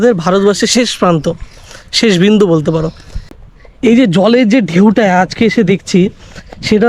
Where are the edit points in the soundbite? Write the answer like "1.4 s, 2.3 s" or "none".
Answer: 3.4 s